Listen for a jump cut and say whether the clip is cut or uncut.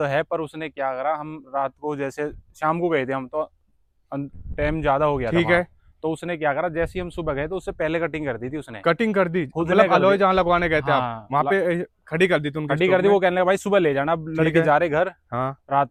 uncut